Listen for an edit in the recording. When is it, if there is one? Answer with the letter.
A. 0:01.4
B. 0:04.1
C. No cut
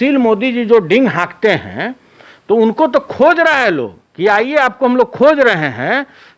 C